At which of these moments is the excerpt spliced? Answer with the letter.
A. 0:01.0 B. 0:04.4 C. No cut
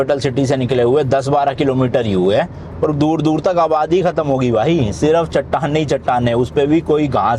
C